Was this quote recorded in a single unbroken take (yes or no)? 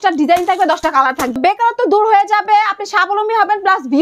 no